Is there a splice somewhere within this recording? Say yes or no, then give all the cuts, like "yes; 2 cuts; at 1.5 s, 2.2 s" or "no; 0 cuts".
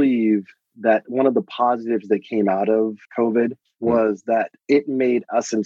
no; 0 cuts